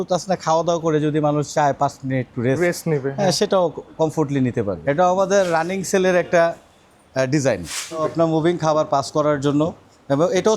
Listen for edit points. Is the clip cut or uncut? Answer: cut